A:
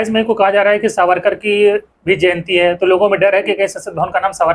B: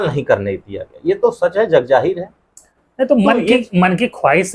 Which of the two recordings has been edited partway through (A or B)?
B